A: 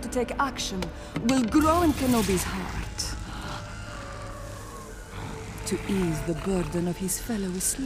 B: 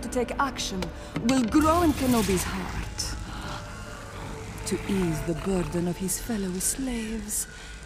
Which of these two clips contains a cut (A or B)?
B